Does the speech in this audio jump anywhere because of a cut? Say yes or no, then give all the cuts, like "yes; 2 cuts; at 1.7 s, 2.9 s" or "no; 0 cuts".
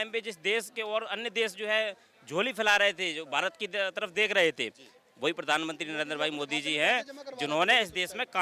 no; 0 cuts